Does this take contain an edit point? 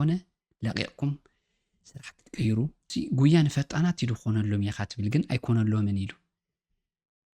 yes; 1 cut; at 2.9 s

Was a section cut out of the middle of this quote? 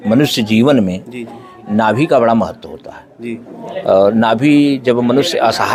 no; 0 cuts

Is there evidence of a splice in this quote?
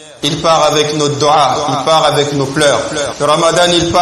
yes; 1 cut; at 3.1 s

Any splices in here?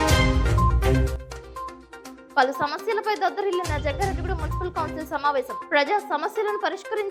no; 0 cuts

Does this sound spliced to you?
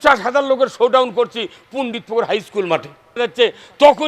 yes; 1 cut; at 3.2 s

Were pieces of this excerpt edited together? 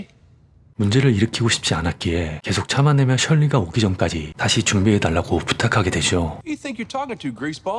no; 0 cuts

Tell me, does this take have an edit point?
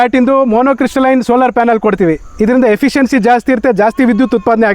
no; 0 cuts

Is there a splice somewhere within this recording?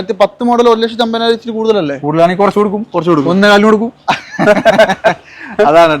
no; 0 cuts

